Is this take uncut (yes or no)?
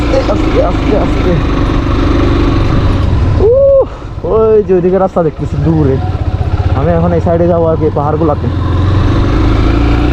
yes